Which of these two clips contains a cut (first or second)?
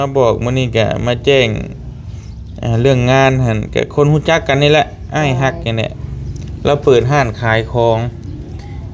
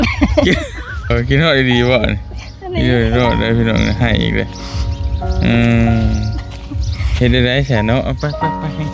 second